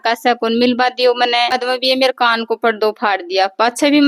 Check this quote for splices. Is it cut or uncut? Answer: cut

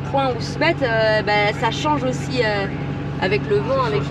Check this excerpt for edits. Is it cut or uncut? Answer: uncut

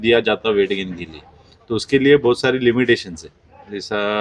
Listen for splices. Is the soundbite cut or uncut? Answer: uncut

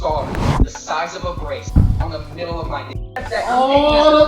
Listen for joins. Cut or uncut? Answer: cut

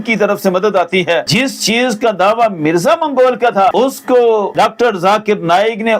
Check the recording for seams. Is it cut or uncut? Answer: cut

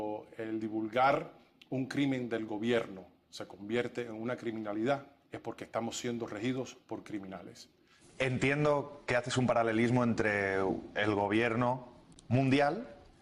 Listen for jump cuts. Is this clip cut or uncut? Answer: uncut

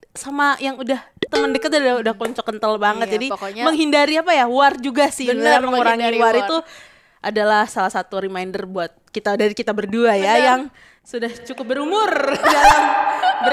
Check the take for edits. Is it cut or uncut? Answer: uncut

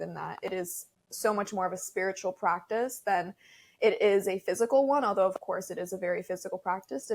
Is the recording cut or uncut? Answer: uncut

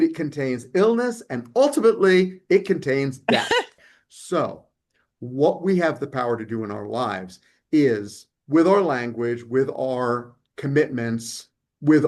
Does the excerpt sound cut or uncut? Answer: cut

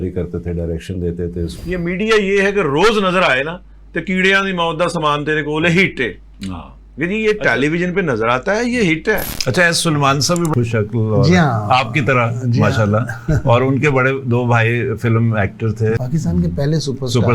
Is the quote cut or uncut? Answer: uncut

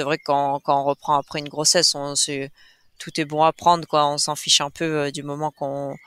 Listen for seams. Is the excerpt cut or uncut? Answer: uncut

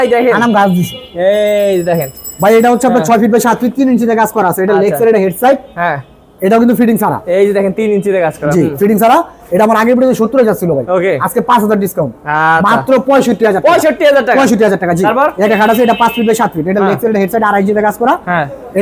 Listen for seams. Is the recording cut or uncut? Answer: uncut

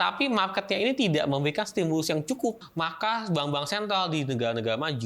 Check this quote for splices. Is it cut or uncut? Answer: cut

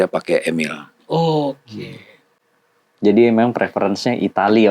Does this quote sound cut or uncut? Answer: uncut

